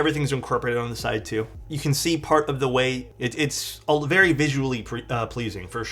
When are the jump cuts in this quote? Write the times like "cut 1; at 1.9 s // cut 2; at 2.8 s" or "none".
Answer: none